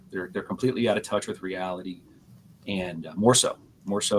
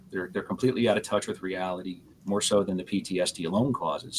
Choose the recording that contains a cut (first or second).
second